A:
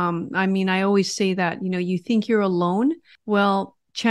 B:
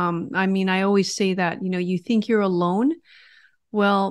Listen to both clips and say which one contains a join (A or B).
A